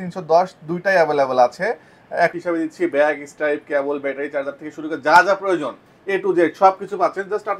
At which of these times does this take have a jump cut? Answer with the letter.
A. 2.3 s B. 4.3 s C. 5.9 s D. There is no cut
A